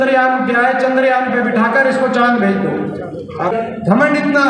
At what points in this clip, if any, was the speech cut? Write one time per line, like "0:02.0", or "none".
0:03.5

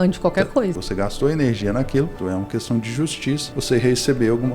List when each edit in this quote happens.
0:00.7
0:02.2
0:03.5

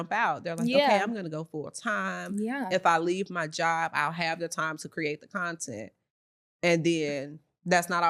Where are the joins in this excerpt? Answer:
none

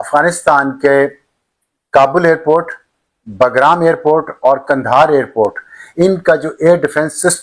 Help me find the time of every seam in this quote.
none

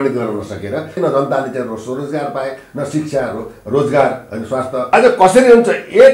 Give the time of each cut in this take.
0:01.0
0:04.9

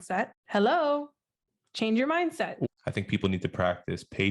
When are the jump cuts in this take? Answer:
0:02.7

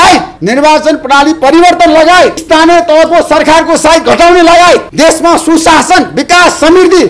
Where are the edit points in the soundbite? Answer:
none

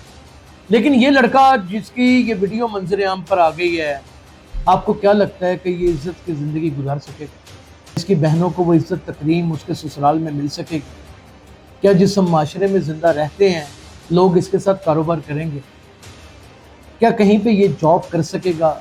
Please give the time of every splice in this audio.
none

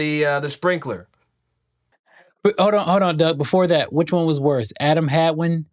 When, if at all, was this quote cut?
none

